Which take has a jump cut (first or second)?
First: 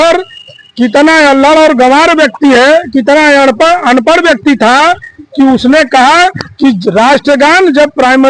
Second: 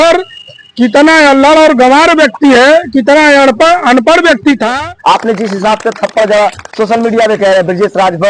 second